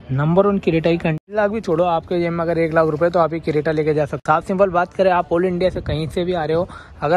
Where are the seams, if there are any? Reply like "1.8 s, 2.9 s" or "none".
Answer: 1.3 s, 4.2 s